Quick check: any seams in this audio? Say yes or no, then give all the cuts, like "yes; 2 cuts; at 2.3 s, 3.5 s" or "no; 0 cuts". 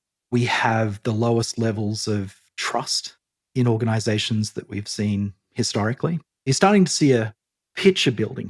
yes; 1 cut; at 6.5 s